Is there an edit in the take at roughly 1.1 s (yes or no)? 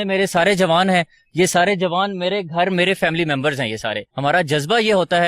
no